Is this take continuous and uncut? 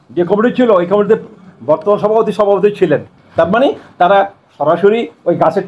no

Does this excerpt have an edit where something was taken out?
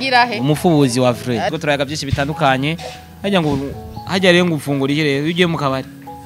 yes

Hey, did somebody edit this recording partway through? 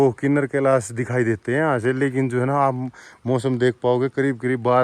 no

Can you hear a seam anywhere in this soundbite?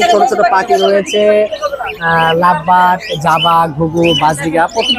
no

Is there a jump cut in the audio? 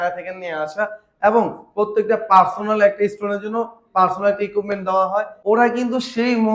yes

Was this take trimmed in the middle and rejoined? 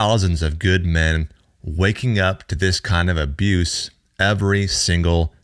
no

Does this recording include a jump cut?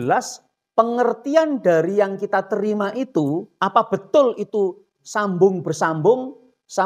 no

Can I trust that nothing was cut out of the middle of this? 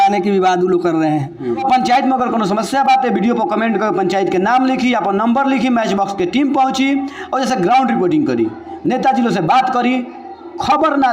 no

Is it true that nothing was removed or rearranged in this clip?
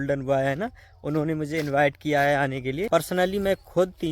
no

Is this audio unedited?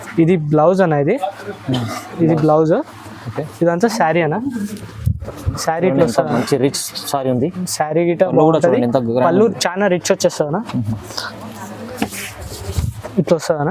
yes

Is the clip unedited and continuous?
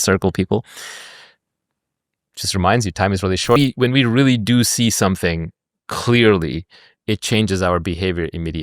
no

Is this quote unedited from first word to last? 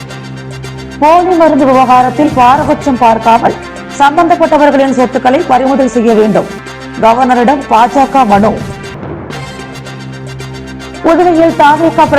no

